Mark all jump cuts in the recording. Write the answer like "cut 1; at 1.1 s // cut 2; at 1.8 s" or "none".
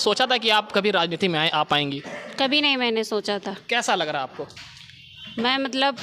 none